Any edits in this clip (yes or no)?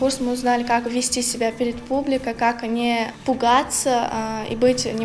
yes